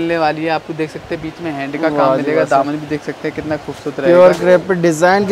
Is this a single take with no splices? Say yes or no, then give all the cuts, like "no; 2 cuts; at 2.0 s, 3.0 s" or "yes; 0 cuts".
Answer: yes; 0 cuts